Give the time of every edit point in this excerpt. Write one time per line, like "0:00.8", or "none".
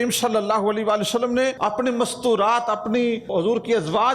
0:01.6
0:03.3